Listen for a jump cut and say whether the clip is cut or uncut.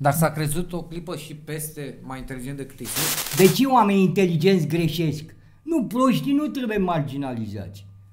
cut